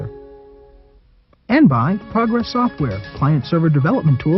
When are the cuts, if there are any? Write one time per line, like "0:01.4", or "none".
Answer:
0:01.5